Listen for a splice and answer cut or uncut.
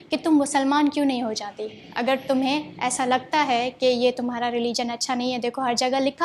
uncut